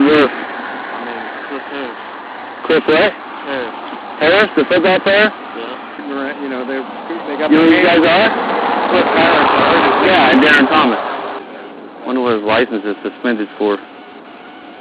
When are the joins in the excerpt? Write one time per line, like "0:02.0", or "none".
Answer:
0:05.9
0:11.4